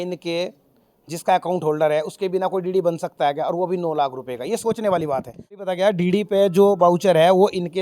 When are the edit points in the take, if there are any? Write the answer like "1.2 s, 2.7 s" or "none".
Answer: 5.6 s

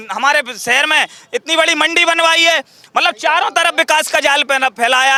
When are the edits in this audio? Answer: none

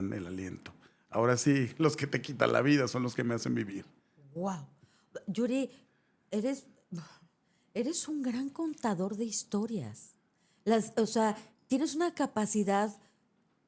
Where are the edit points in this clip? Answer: none

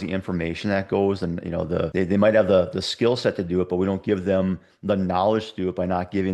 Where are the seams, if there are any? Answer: 1.9 s

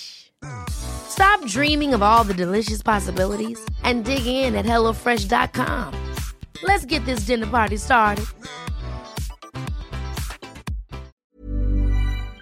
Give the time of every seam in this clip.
11.1 s

